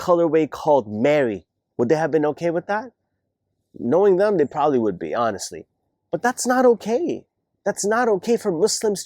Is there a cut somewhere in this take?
no; 0 cuts

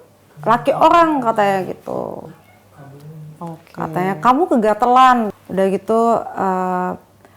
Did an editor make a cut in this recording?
yes; 1 cut; at 5.4 s

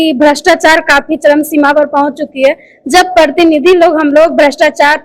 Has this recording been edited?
no; 0 cuts

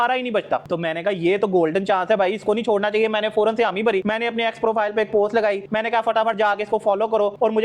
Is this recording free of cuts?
yes; 0 cuts

